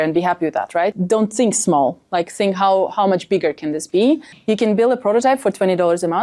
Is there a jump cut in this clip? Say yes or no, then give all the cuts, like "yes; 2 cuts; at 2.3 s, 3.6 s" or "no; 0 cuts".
yes; 2 cuts; at 1.0 s, 4.3 s